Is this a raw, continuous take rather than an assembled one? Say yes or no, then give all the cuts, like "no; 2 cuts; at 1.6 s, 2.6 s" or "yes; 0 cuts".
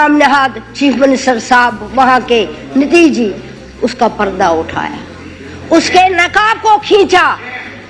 yes; 0 cuts